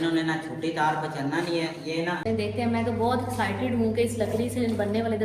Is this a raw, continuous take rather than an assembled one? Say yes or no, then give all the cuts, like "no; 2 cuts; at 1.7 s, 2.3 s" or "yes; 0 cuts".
no; 1 cut; at 2.2 s